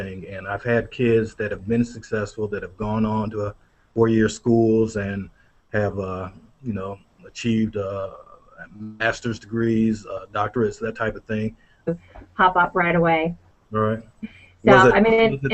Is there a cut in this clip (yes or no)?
no